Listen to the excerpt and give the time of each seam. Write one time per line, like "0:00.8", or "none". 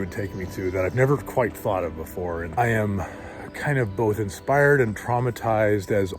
0:02.5